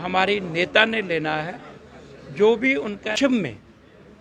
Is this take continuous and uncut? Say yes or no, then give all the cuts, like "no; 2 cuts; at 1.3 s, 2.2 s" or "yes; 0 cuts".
no; 1 cut; at 3.2 s